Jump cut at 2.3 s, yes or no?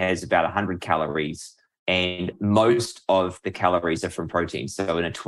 yes